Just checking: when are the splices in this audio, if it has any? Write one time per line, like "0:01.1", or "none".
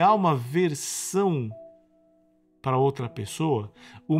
none